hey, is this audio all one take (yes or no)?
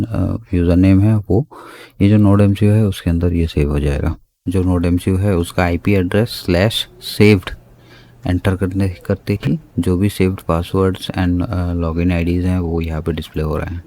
no